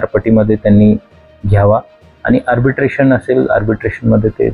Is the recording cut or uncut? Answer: uncut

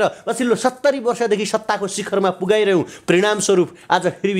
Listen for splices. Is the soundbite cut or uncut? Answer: uncut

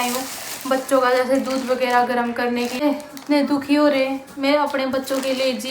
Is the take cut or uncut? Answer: cut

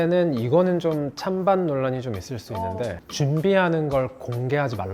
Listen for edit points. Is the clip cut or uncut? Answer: cut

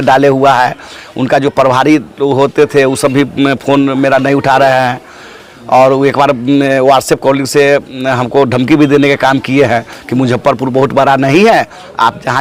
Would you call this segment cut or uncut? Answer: uncut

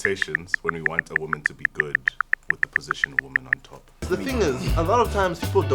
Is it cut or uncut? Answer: cut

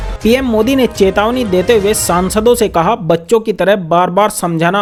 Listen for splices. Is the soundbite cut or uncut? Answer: uncut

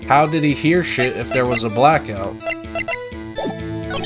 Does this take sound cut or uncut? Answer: uncut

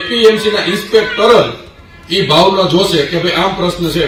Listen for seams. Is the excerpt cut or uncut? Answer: uncut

